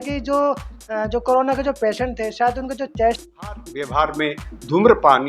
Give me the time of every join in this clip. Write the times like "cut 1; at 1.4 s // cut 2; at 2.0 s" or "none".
cut 1; at 3.7 s

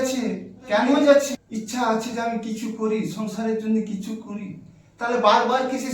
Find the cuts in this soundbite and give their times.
cut 1; at 1.3 s

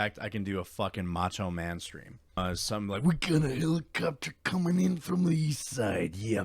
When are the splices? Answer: cut 1; at 2.4 s

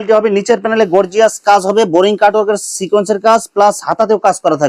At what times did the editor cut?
none

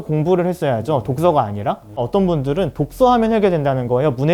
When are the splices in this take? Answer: cut 1; at 2.0 s

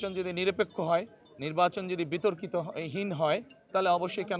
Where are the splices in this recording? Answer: none

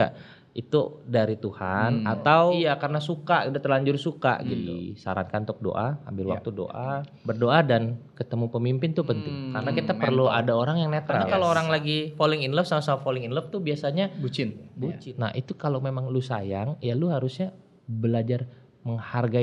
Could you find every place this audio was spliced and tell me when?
cut 1; at 2.6 s // cut 2; at 4.7 s // cut 3; at 7.1 s // cut 4; at 9.4 s // cut 5; at 11.3 s // cut 6; at 15.0 s

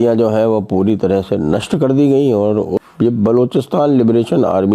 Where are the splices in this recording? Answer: cut 1; at 2.8 s

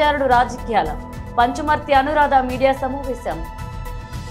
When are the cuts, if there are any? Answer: cut 1; at 3.4 s

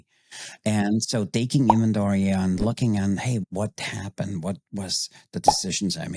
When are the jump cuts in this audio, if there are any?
cut 1; at 3.4 s

